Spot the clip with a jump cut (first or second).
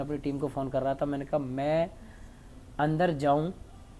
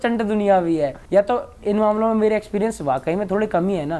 second